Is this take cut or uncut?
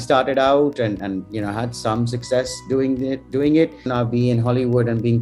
cut